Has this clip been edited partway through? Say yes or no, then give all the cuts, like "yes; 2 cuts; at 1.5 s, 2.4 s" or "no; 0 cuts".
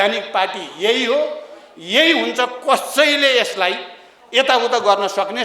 no; 0 cuts